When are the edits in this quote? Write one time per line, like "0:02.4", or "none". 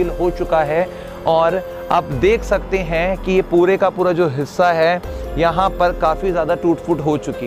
none